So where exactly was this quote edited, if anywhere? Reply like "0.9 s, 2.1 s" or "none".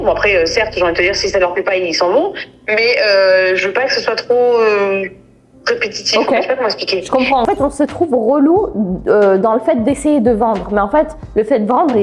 7.4 s